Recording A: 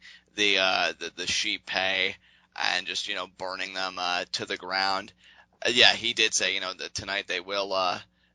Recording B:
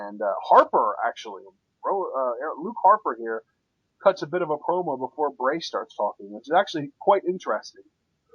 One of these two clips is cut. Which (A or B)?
B